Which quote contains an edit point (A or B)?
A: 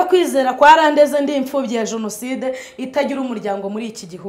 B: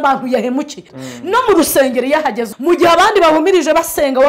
B